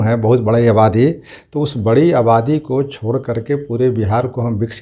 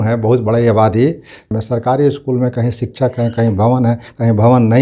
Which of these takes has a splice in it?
second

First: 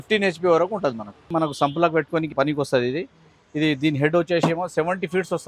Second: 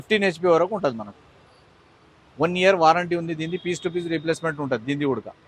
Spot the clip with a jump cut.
first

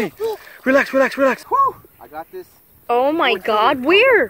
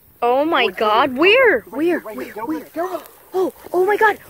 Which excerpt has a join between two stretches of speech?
first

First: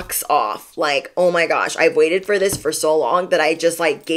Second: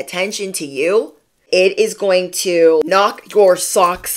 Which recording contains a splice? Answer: second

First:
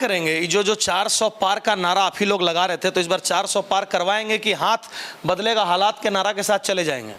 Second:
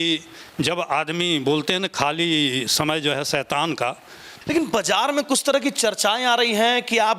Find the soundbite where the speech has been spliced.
second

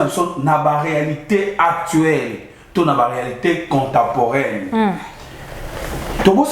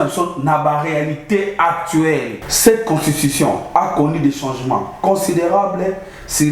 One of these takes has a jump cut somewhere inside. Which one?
second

